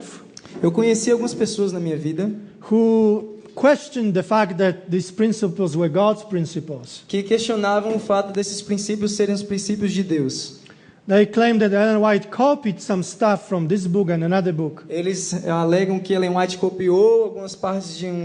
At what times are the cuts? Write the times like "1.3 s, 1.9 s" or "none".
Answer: 1.7 s